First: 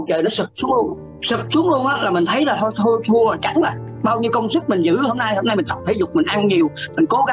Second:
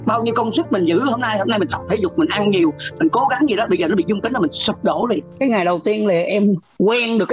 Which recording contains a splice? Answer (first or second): second